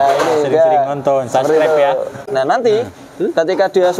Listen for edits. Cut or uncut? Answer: cut